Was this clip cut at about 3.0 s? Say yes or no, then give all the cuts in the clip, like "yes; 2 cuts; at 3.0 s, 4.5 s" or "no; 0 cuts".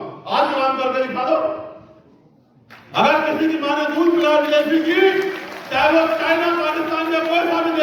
no; 0 cuts